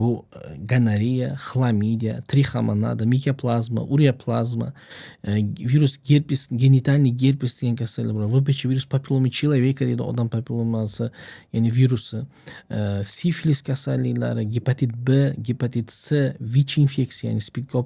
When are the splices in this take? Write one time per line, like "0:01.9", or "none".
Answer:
none

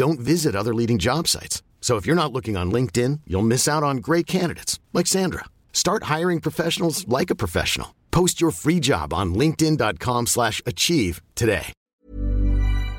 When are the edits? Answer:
0:11.7

